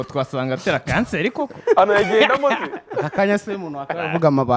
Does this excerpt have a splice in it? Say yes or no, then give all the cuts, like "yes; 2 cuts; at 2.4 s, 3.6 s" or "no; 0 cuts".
no; 0 cuts